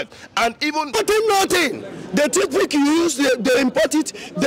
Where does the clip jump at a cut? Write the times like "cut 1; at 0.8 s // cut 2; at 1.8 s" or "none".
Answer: cut 1; at 1.0 s